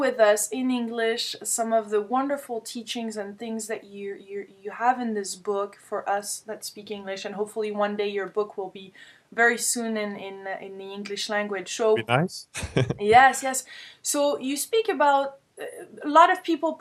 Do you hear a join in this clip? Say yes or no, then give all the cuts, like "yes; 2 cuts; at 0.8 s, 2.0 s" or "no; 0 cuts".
no; 0 cuts